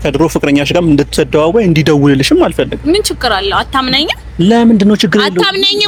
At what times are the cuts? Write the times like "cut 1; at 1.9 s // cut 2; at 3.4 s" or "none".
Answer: none